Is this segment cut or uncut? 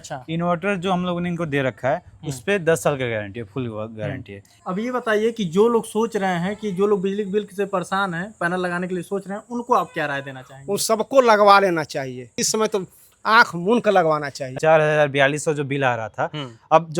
cut